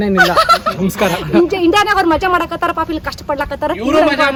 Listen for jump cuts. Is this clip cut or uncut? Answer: uncut